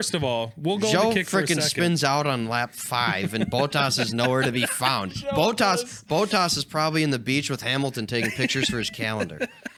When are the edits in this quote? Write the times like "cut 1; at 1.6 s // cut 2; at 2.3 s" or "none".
none